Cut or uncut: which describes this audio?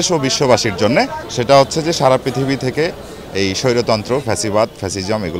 cut